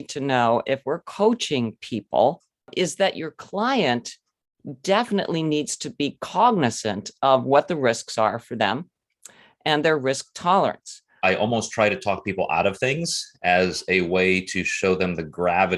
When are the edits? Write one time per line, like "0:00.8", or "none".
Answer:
0:02.7
0:11.2

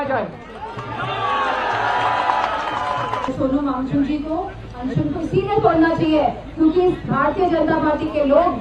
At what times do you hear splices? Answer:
0:03.3

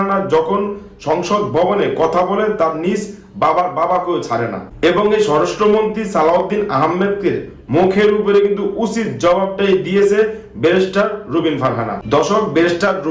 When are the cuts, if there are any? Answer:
none

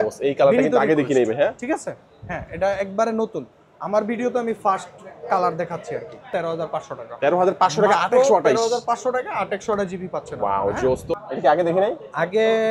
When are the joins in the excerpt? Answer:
0:06.3
0:11.2

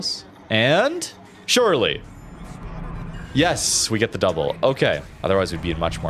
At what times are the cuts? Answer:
0:05.1

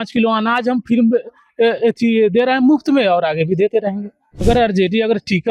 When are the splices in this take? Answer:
0:04.4

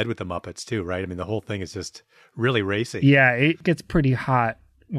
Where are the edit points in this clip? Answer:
0:03.6

